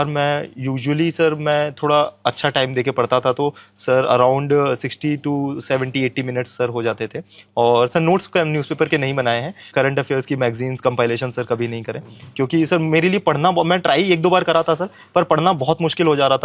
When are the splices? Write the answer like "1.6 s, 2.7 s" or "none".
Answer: 9.7 s

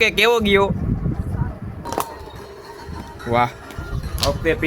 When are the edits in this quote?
1.9 s

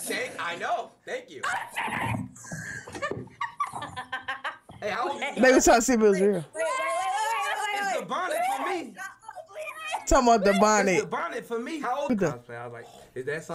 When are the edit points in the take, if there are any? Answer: 12.1 s

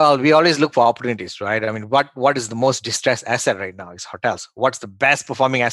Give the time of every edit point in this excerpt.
none

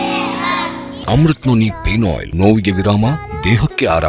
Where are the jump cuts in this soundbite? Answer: 0.9 s, 2.2 s

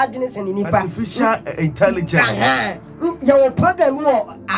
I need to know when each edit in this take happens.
none

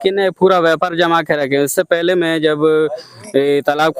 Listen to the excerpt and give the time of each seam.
none

